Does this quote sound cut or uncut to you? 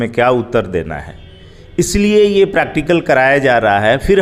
uncut